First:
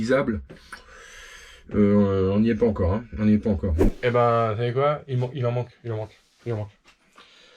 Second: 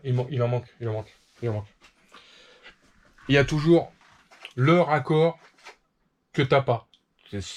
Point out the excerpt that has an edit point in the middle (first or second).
first